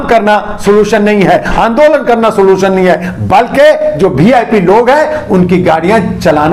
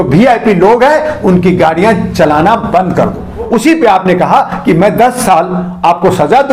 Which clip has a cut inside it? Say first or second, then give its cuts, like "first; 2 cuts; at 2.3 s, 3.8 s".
second; 1 cut; at 3.5 s